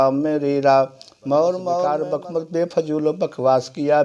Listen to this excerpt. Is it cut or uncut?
cut